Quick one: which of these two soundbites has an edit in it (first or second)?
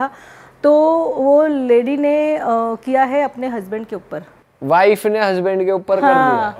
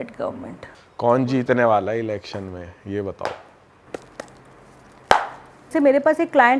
second